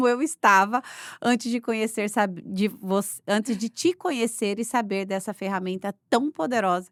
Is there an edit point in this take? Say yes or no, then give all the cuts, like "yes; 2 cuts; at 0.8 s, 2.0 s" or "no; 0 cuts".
no; 0 cuts